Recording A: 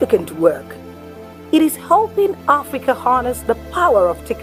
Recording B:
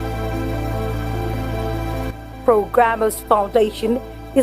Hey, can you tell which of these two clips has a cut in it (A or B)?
B